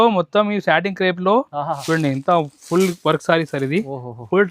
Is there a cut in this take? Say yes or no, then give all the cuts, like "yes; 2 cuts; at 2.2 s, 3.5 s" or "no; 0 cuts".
yes; 1 cut; at 1.8 s